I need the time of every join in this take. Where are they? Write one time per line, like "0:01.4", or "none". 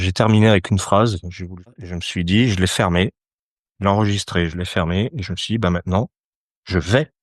0:01.8